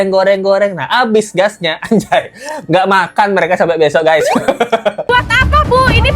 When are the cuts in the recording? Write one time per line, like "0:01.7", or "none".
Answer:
0:05.1